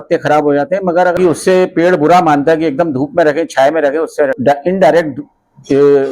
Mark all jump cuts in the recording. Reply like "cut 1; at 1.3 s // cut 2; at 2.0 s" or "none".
cut 1; at 1.1 s // cut 2; at 4.4 s